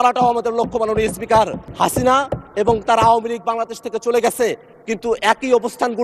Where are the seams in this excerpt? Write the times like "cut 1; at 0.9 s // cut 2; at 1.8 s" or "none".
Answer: cut 1; at 1.6 s